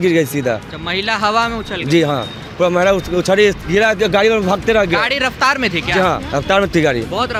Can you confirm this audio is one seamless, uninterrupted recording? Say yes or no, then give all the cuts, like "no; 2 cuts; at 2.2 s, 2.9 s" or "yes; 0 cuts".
yes; 0 cuts